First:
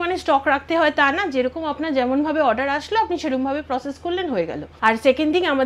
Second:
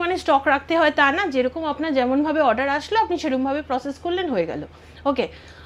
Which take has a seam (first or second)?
first